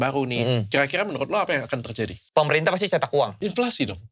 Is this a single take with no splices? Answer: no; 2 cuts; at 2.2 s, 3.4 s

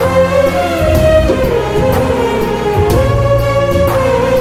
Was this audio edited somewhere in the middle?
no; 0 cuts

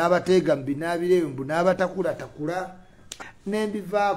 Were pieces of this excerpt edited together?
yes; 1 cut; at 3.1 s

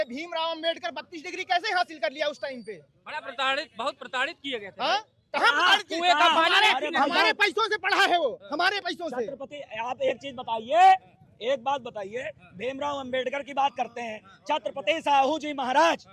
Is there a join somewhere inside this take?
no; 0 cuts

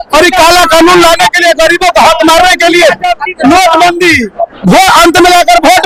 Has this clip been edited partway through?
no; 0 cuts

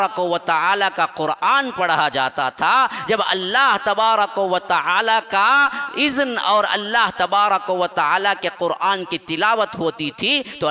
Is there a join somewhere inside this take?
no; 0 cuts

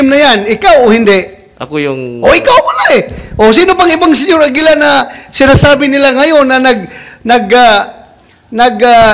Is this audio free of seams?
yes; 0 cuts

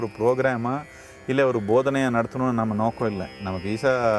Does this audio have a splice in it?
no; 0 cuts

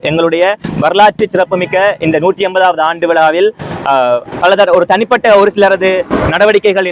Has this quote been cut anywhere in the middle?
no; 0 cuts

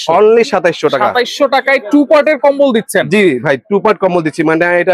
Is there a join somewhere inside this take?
no; 0 cuts

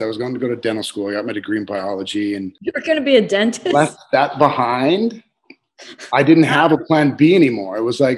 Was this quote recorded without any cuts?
no; 1 cut; at 2.6 s

